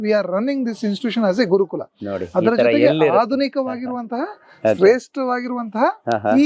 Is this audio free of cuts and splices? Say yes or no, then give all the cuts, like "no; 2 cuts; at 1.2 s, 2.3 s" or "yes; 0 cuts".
yes; 0 cuts